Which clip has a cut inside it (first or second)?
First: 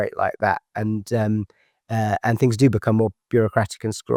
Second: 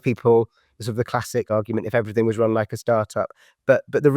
second